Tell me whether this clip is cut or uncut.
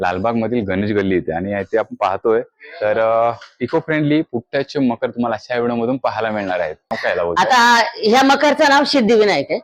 cut